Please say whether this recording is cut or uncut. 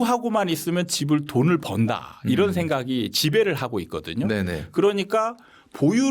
uncut